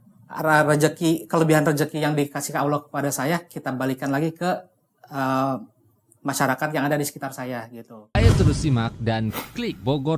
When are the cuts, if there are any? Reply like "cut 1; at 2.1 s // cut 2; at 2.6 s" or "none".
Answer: cut 1; at 8.2 s